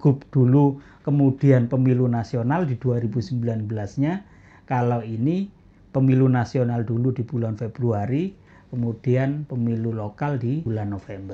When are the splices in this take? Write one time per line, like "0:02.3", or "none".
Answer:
0:09.5
0:10.6